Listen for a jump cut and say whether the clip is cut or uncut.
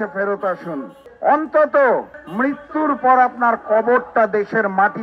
uncut